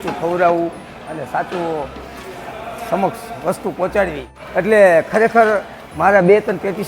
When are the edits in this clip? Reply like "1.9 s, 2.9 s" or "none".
4.3 s

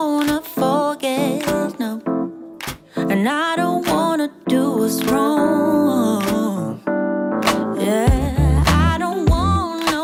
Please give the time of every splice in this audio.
none

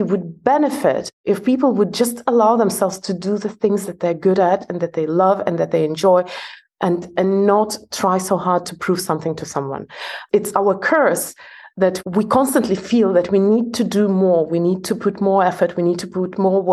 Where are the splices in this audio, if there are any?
10.2 s, 12.0 s

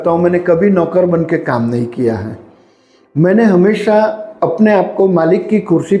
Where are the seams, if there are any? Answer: none

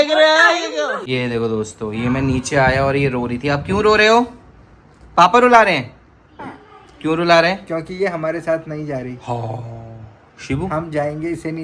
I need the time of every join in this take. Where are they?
1.0 s

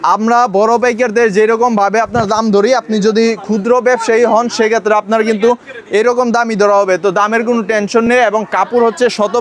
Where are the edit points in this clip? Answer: none

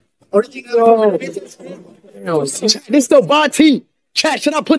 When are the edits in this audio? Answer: 2.3 s

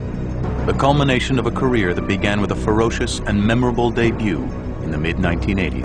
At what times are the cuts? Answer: none

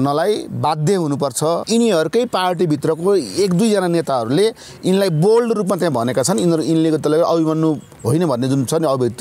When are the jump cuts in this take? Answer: 1.6 s, 7.9 s

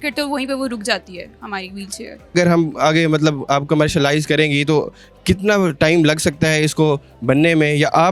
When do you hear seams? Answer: none

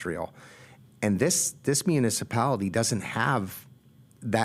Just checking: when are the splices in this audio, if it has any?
none

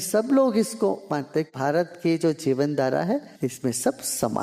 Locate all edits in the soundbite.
1.5 s, 3.3 s

